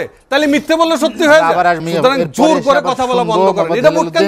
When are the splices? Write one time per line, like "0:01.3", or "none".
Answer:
0:01.8